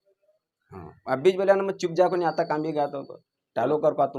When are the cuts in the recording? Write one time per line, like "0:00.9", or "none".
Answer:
none